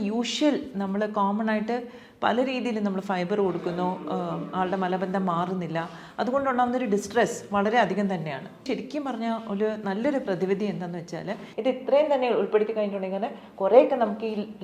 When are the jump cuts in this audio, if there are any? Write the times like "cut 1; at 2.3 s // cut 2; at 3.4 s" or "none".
cut 1; at 8.6 s // cut 2; at 11.4 s

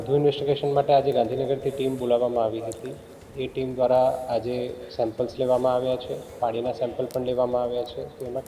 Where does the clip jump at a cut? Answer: none

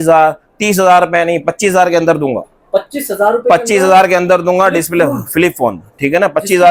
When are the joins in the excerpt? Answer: none

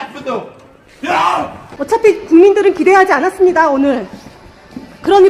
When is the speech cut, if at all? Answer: cut 1; at 1.6 s

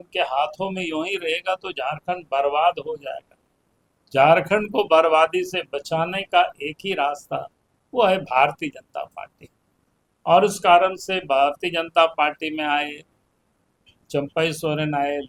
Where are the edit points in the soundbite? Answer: none

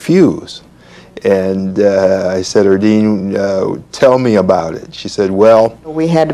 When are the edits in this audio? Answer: cut 1; at 2.3 s

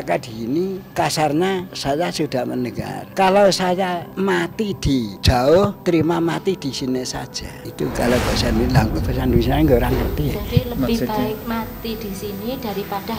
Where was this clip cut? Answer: cut 1; at 0.8 s // cut 2; at 1.7 s // cut 3; at 3.0 s // cut 4; at 4.1 s // cut 5; at 5.1 s // cut 6; at 5.8 s // cut 7; at 7.6 s

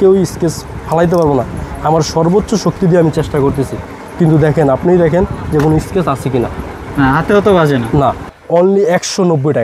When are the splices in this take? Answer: cut 1; at 8.2 s

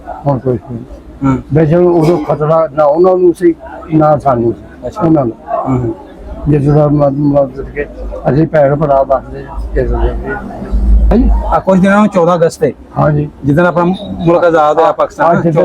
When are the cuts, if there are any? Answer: cut 1; at 11.0 s

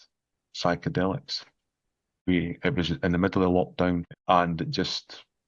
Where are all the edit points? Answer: cut 1; at 2.3 s // cut 2; at 4.1 s

